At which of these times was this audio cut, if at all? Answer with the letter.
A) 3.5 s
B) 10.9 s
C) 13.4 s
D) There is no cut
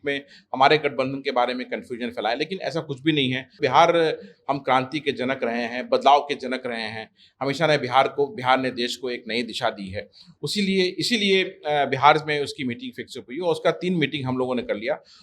A